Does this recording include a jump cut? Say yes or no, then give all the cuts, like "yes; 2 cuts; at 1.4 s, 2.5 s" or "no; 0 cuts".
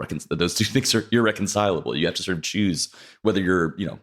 no; 0 cuts